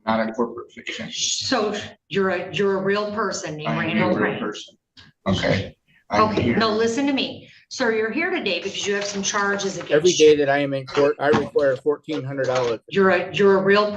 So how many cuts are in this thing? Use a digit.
3